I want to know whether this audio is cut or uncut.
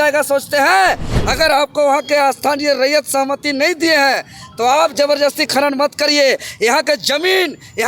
cut